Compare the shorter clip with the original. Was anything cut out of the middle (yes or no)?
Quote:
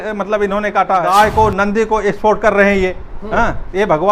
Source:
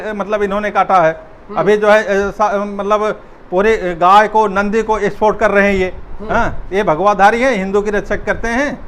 yes